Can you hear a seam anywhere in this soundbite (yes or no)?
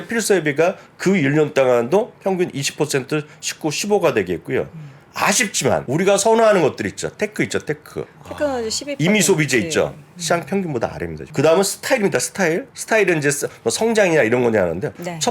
yes